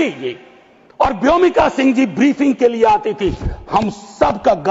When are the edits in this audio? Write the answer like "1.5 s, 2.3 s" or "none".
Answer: none